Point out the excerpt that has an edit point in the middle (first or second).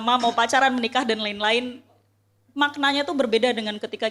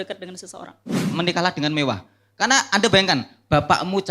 second